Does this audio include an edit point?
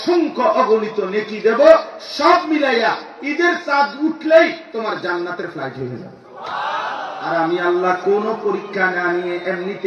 yes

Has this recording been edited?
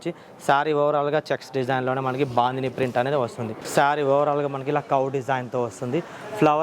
yes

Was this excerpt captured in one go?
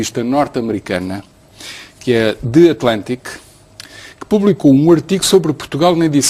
no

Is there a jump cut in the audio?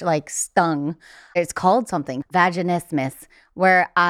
yes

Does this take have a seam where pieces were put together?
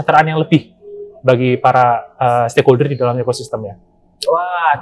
no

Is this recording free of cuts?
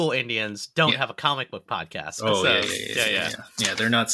no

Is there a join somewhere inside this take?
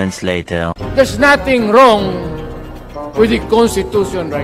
no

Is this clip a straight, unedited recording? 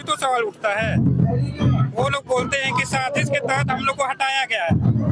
yes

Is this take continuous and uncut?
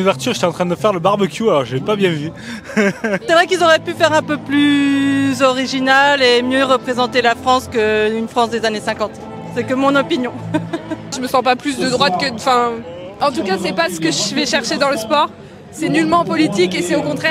no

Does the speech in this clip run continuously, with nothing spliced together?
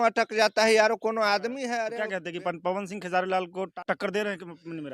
no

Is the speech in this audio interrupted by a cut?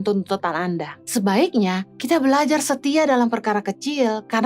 yes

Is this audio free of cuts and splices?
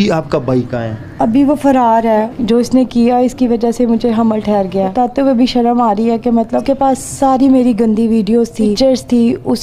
no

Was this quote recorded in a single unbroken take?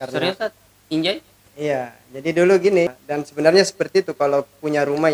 no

